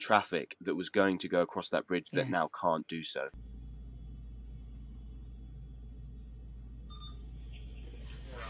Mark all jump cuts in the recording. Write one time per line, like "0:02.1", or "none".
0:03.4